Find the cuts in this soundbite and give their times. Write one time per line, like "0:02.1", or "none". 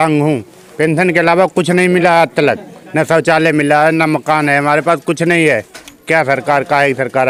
none